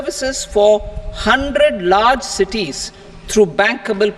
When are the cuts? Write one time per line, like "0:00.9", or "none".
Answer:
none